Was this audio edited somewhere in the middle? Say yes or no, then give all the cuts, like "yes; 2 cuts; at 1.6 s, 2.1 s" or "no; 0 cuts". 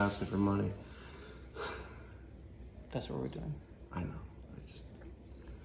no; 0 cuts